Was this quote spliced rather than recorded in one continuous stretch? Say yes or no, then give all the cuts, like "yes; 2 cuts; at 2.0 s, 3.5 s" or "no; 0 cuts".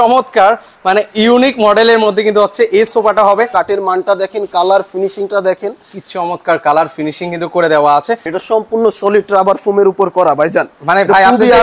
yes; 2 cuts; at 3.5 s, 8.3 s